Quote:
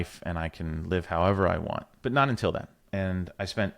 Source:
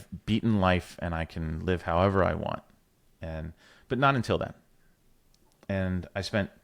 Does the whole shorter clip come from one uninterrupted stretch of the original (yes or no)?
no